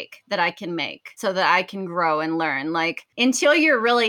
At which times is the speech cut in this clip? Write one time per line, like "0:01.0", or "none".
0:01.2
0:03.1